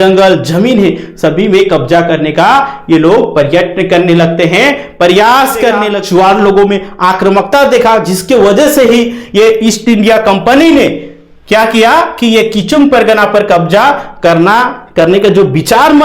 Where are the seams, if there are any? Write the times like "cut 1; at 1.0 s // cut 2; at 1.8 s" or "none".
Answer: cut 1; at 5.9 s